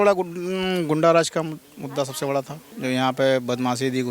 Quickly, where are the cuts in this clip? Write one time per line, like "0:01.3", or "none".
0:02.6